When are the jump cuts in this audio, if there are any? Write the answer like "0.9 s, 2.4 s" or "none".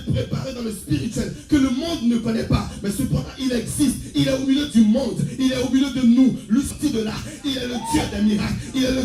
6.7 s